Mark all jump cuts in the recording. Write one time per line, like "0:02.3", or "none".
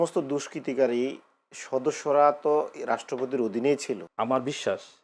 0:04.1